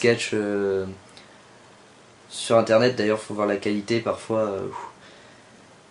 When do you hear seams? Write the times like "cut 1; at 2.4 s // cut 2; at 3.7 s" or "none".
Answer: cut 1; at 4.2 s